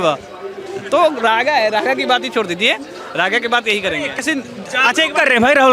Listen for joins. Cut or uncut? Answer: cut